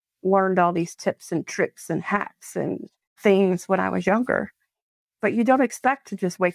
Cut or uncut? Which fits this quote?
cut